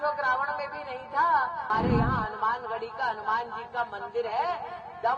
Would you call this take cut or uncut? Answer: cut